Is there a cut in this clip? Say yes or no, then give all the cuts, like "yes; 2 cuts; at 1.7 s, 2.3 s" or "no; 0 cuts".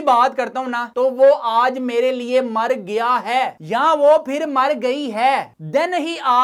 no; 0 cuts